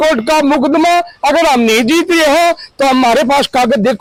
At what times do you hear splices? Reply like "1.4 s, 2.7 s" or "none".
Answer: none